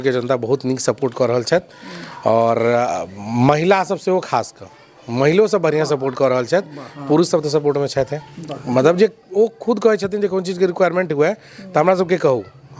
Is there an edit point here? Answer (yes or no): no